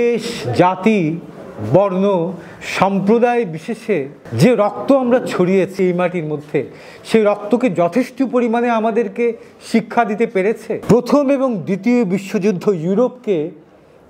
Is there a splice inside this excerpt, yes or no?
yes